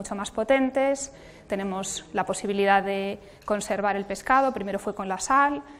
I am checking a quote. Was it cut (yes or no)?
yes